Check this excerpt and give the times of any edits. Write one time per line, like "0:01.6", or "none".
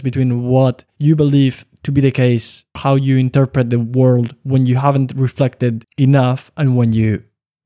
0:00.9
0:02.8
0:05.9